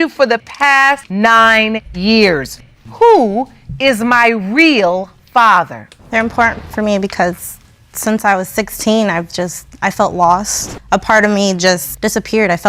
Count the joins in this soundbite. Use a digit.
1